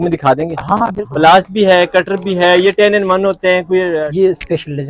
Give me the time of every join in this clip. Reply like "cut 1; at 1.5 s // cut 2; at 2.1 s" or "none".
cut 1; at 1.0 s // cut 2; at 3.9 s